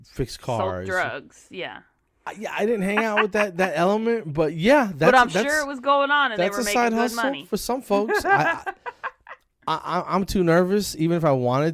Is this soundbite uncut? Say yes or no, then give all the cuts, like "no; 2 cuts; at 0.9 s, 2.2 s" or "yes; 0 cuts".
yes; 0 cuts